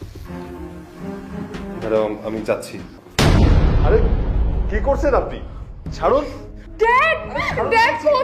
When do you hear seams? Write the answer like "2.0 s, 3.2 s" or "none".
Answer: 3.0 s